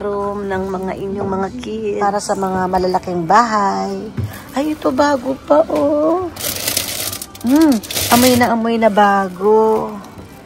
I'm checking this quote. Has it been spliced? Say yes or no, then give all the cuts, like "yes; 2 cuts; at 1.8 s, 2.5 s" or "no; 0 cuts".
yes; 1 cut; at 2.0 s